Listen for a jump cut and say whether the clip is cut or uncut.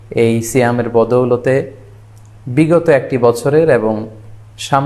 uncut